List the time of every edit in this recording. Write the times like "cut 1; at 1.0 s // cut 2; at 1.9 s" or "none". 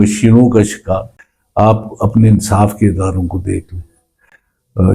cut 1; at 1.1 s

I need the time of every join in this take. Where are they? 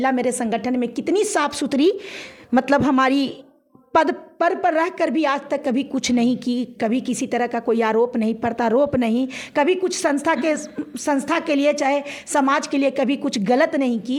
none

